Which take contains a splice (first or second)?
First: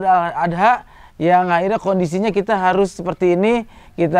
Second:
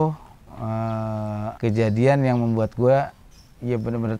second